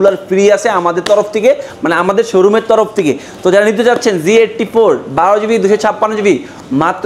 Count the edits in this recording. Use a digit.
0